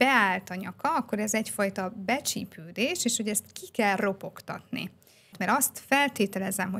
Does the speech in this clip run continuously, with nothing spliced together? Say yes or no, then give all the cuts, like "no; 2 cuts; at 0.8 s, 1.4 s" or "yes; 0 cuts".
no; 1 cut; at 5.3 s